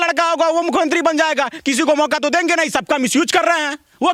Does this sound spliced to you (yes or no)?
no